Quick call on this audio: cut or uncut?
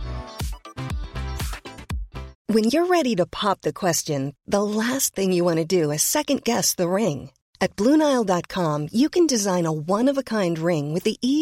cut